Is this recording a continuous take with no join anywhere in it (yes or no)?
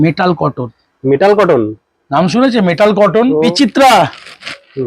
no